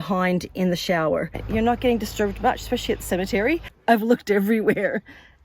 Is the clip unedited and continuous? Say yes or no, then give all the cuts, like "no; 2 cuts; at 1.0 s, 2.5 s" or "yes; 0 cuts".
no; 2 cuts; at 1.4 s, 3.7 s